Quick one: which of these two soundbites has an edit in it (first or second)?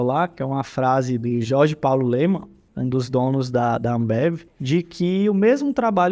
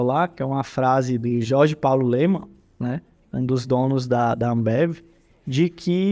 first